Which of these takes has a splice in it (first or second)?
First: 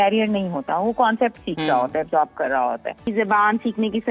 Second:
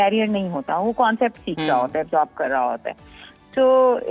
first